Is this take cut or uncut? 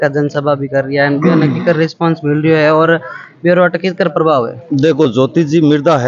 uncut